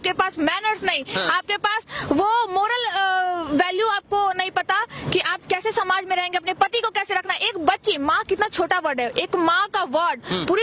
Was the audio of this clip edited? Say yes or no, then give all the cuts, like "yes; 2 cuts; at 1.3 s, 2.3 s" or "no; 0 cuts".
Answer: no; 0 cuts